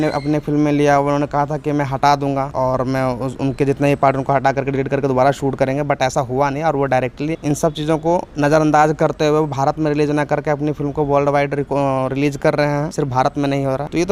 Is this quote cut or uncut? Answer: uncut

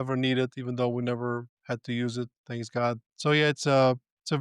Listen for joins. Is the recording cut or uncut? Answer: cut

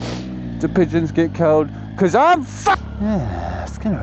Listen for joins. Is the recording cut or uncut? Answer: cut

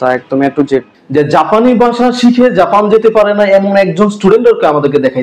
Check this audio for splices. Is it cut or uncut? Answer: cut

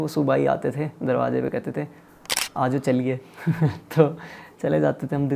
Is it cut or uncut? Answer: uncut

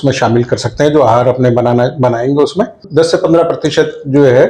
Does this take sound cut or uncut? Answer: cut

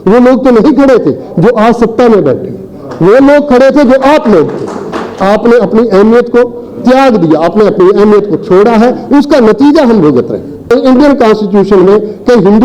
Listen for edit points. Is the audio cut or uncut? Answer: cut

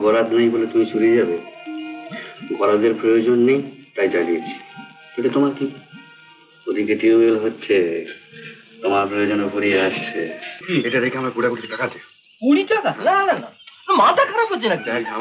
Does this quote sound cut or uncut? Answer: cut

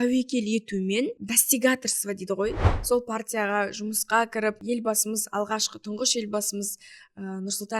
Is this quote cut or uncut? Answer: cut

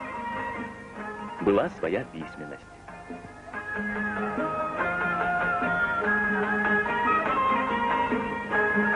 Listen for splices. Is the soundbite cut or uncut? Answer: uncut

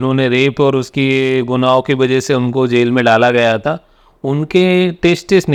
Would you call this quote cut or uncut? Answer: uncut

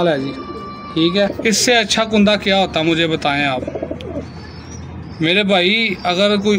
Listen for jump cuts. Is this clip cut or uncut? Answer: cut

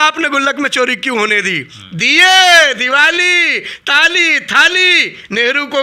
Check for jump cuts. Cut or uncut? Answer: uncut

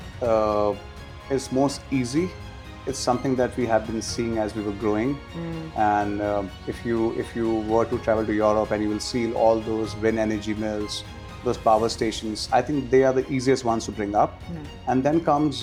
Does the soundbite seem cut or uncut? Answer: uncut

